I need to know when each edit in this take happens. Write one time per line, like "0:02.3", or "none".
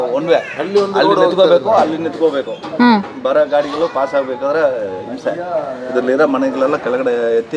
none